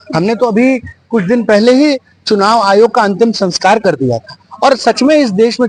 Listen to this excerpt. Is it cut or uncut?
uncut